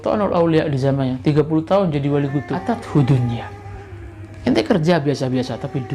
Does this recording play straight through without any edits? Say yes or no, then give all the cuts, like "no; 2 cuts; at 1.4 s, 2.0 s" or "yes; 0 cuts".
no; 1 cut; at 2.7 s